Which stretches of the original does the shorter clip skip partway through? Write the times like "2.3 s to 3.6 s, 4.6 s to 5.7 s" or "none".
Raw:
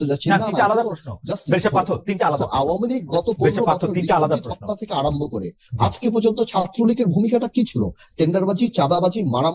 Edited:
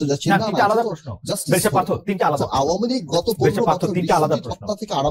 none